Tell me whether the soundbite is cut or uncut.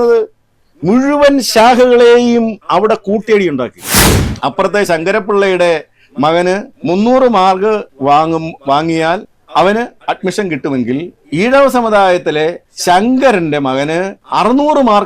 cut